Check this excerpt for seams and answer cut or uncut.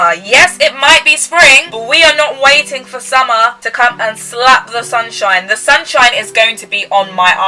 uncut